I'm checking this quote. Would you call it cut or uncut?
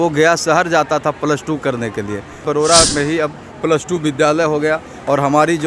cut